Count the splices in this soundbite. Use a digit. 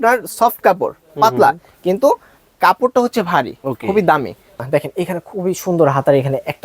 1